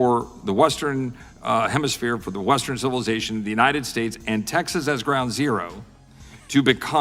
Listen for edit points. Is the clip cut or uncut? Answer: uncut